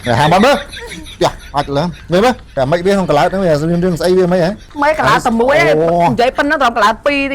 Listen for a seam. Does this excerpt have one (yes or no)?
yes